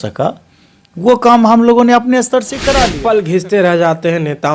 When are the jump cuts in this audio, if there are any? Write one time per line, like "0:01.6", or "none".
0:02.9